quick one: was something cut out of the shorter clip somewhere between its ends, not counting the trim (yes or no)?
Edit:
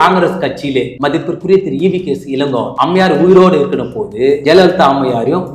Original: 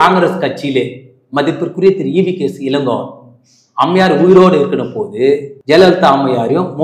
yes